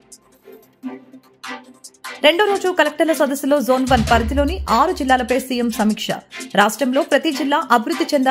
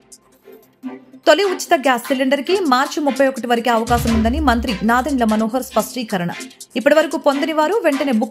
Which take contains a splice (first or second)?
first